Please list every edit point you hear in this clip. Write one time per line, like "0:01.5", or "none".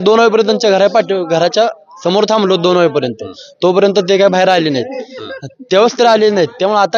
none